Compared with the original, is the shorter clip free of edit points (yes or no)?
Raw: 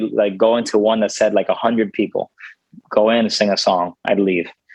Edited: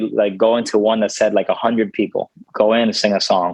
no